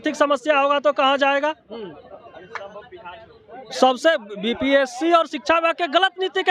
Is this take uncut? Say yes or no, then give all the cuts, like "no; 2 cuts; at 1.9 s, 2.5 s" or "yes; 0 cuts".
yes; 0 cuts